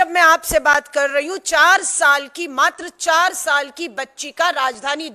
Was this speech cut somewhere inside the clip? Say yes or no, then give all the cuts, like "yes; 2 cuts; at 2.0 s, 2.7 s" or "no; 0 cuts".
no; 0 cuts